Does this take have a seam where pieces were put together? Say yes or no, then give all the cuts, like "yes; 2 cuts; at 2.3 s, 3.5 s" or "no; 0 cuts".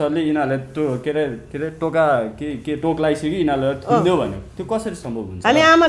no; 0 cuts